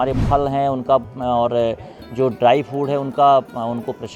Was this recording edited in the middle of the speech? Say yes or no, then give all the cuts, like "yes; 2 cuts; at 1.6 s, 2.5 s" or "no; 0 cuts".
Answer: no; 0 cuts